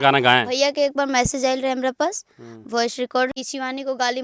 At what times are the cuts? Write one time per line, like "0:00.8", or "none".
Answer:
0:03.3